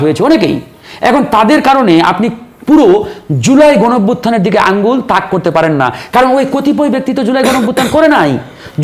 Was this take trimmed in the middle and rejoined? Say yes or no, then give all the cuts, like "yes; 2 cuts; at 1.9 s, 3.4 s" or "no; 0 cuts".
no; 0 cuts